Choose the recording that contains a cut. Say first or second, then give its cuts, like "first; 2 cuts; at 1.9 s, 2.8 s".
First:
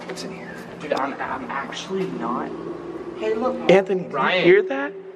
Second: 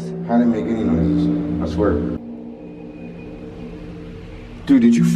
second; 1 cut; at 2.2 s